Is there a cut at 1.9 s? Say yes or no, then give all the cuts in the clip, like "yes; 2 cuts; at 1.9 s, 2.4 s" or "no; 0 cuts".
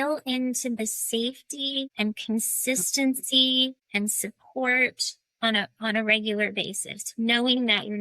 yes; 2 cuts; at 1.9 s, 3.8 s